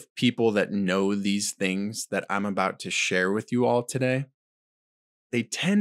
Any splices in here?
no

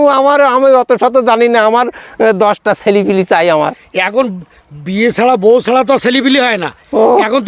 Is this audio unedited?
yes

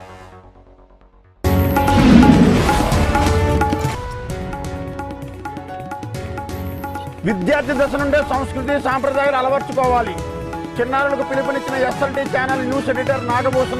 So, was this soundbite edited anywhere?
no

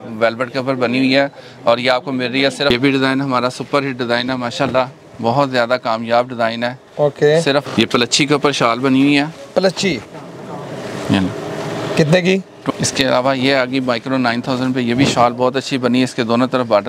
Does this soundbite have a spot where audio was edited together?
yes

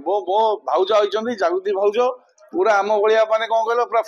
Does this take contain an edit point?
no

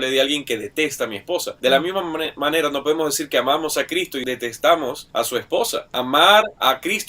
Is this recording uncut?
no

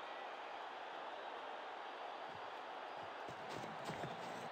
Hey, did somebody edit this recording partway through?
no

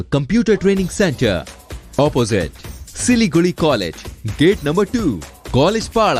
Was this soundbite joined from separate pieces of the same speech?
no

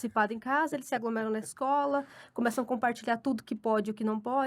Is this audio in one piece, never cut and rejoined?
yes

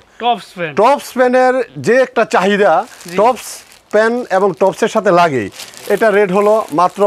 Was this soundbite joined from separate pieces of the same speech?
no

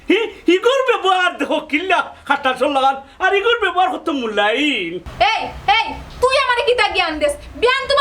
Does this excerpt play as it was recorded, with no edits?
no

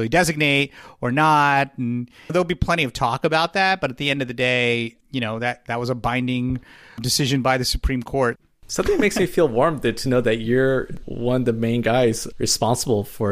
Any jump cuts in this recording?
yes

